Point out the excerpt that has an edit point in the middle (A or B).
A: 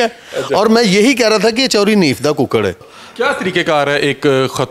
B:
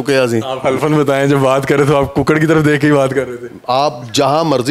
A